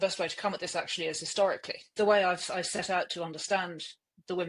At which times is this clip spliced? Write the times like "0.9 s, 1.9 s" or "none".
1.9 s